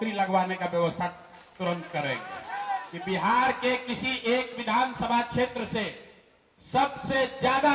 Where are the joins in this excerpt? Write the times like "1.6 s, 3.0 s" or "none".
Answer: 2.9 s